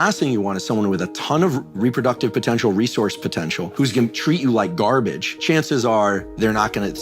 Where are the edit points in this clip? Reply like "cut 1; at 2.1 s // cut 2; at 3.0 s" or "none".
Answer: cut 1; at 3.7 s // cut 2; at 5.2 s